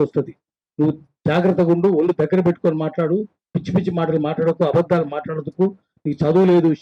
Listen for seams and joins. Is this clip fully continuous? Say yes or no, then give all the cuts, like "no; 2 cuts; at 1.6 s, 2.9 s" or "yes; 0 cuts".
yes; 0 cuts